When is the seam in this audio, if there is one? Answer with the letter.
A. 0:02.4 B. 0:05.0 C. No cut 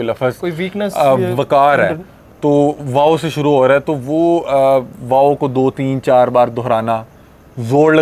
C